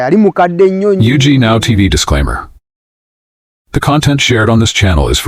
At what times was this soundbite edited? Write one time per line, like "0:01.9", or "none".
0:01.0